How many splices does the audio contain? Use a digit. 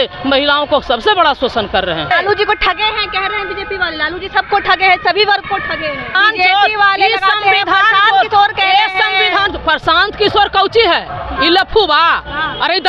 2